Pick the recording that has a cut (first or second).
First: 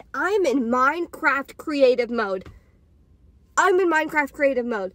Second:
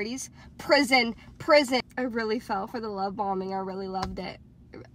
second